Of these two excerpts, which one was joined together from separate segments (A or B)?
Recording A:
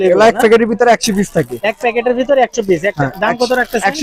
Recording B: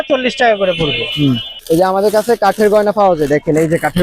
B